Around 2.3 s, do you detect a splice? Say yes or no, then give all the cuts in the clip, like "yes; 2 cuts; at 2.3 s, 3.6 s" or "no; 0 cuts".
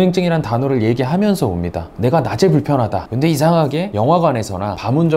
no; 0 cuts